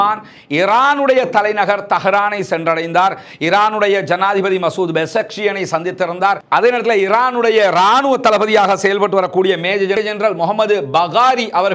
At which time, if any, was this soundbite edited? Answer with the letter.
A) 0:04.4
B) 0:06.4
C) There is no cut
C